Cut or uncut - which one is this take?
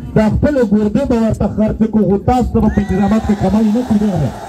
uncut